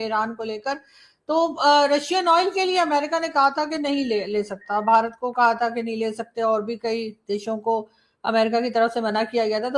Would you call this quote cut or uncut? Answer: uncut